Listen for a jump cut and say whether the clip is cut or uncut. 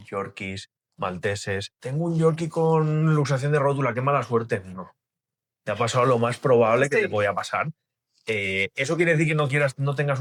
uncut